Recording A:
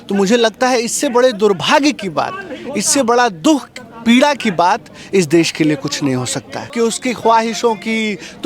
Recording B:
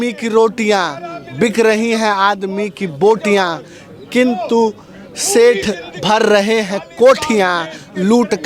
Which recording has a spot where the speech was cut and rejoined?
A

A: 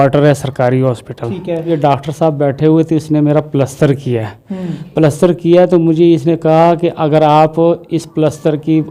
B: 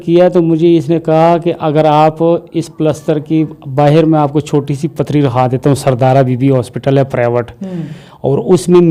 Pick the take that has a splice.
A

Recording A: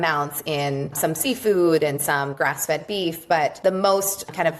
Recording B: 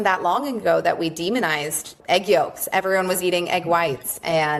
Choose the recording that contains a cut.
A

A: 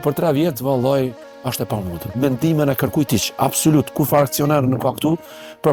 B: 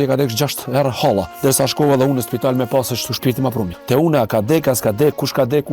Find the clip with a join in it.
B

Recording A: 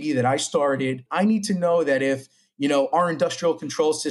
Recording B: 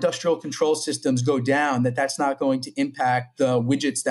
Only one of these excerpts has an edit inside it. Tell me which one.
A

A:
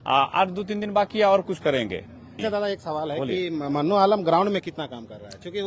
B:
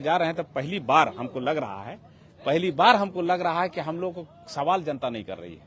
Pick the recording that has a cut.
A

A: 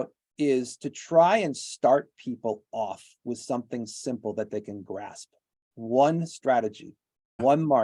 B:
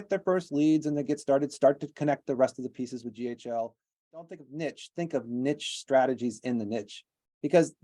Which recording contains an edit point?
B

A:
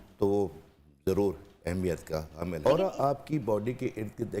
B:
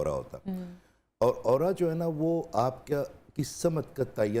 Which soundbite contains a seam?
A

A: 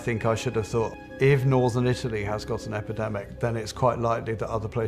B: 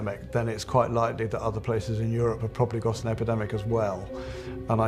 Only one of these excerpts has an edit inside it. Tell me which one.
A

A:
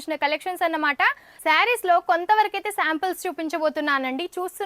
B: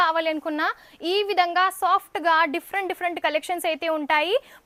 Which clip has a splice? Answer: A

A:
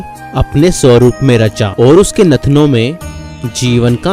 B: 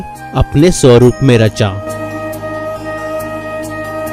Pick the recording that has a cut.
A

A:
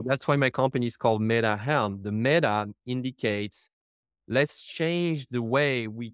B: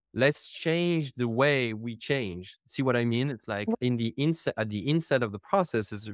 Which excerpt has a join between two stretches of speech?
B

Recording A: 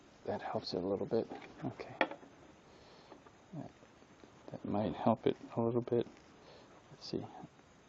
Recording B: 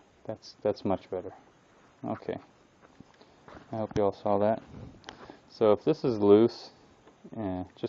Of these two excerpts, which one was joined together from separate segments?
A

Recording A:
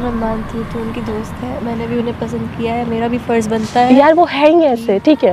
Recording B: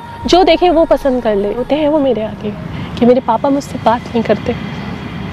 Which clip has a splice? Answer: B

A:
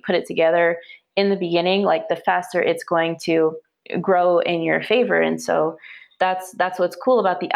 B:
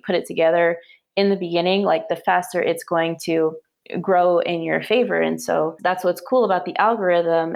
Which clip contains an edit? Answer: B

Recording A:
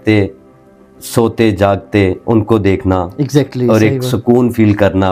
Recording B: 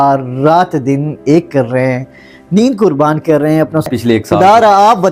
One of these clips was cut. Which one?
B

